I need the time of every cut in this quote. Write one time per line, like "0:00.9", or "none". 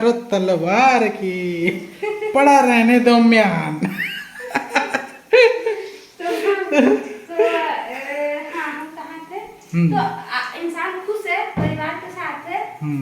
none